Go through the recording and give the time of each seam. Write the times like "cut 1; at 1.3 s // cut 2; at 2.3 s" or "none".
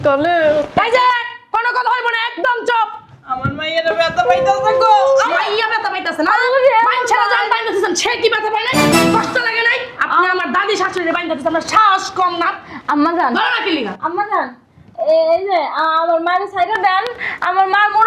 none